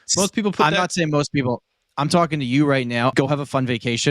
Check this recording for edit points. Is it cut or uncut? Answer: cut